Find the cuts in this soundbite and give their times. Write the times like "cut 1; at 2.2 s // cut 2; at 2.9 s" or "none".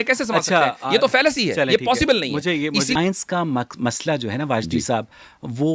cut 1; at 3.0 s